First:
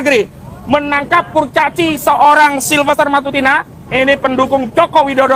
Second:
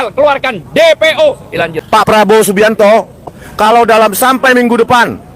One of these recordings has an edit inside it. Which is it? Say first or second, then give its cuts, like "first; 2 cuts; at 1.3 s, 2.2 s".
second; 2 cuts; at 1.8 s, 3.4 s